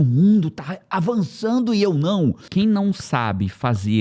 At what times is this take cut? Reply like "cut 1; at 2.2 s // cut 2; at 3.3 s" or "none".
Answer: cut 1; at 2.4 s